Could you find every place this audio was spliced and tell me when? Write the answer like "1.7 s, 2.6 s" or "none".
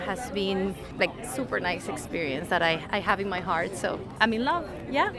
0.9 s, 4.1 s